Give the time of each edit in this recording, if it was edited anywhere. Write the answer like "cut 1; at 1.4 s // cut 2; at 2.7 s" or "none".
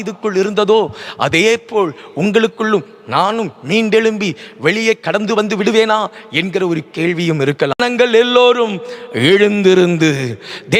cut 1; at 7.8 s